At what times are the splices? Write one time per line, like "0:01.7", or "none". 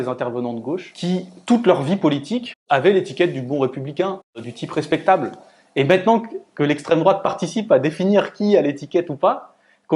0:00.9
0:02.5
0:04.5